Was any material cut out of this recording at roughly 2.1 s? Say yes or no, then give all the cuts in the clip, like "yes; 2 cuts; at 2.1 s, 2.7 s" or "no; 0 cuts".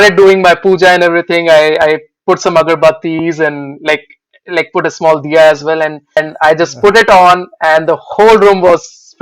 no; 1 cut; at 6.2 s